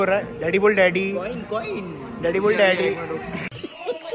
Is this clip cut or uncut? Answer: uncut